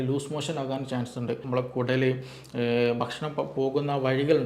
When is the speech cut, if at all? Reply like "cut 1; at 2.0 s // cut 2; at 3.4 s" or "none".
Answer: cut 1; at 1.4 s